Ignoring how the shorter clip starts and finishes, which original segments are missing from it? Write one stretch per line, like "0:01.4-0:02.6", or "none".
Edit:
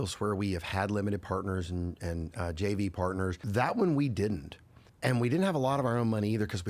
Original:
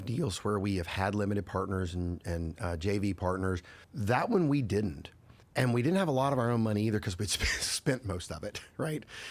0:03.7-0:03.9